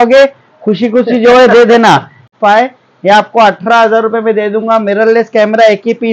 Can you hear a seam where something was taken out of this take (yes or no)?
yes